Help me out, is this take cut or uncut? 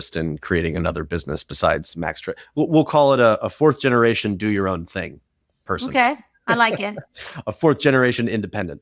uncut